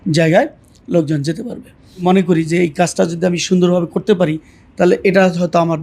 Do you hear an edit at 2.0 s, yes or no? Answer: yes